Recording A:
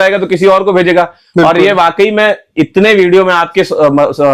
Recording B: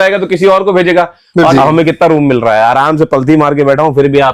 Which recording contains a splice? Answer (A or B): B